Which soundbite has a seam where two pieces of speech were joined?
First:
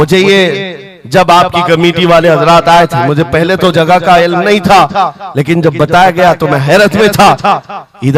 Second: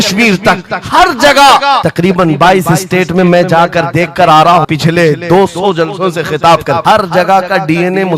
second; 3 cuts; at 1.9 s, 4.7 s, 6.8 s

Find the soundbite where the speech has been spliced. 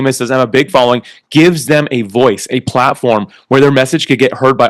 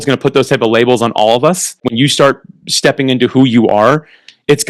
second; 1 cut; at 1.9 s

